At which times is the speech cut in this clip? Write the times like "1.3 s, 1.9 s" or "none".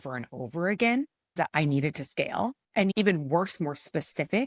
1.3 s, 2.9 s